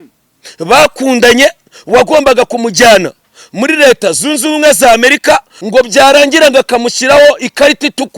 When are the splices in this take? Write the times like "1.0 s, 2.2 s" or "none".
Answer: 5.5 s